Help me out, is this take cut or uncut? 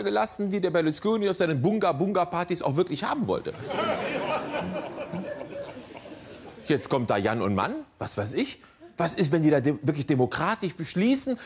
cut